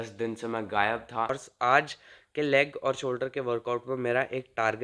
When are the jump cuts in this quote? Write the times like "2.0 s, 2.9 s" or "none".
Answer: 1.3 s